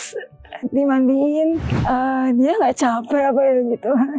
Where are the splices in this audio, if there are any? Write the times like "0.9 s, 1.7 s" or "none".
1.7 s